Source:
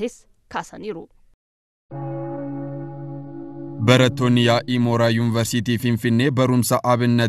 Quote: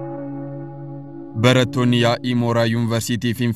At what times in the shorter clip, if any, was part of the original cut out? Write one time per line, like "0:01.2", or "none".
0:01.3